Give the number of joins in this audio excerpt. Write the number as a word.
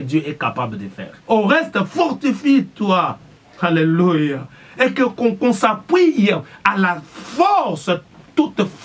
one